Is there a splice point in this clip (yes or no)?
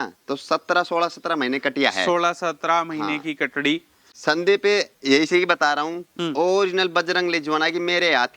yes